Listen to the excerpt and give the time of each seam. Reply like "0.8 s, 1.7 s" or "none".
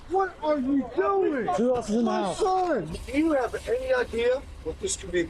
1.5 s, 3.0 s